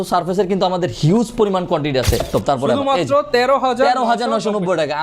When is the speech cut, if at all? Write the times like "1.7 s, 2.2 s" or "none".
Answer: 2.3 s

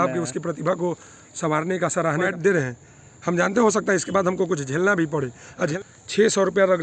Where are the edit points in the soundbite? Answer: 2.3 s, 5.7 s

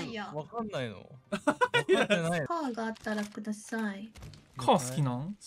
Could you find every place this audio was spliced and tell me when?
2.5 s

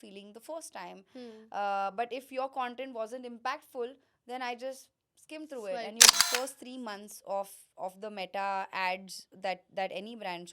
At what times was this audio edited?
6.1 s

